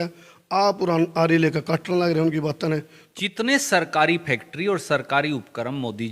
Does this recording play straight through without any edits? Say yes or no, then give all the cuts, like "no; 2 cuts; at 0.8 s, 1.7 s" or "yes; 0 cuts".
no; 1 cut; at 3.0 s